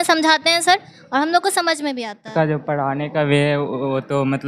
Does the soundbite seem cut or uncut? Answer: cut